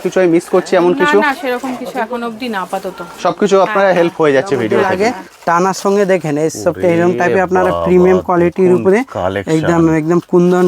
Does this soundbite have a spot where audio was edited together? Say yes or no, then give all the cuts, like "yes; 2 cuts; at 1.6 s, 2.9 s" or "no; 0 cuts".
yes; 1 cut; at 4.9 s